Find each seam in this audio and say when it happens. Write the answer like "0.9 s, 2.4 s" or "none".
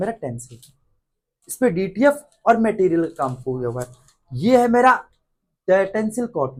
none